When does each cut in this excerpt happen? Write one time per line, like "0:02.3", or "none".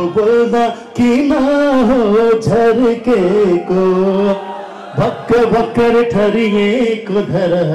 none